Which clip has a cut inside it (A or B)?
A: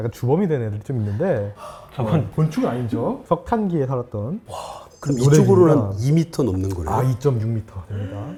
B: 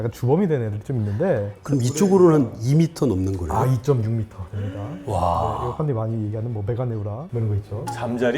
B